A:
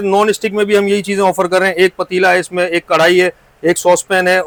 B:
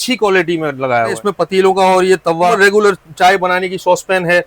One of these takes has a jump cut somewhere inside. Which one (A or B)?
B